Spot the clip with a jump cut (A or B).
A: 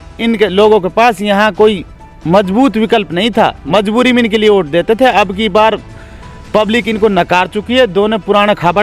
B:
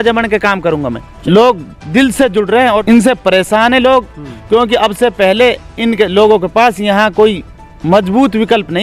B